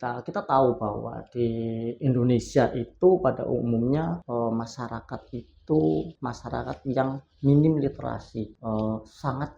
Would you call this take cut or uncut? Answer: cut